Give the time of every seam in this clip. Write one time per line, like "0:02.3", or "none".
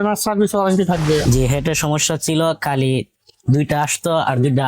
0:01.2